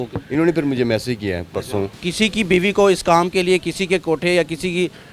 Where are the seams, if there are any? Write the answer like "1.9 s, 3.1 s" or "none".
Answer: 2.0 s